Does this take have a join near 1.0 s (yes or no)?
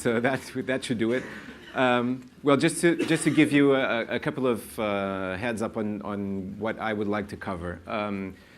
no